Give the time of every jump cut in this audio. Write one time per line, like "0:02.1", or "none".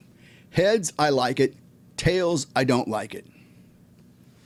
none